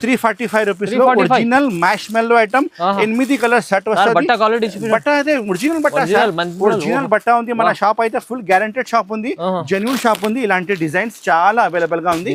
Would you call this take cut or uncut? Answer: uncut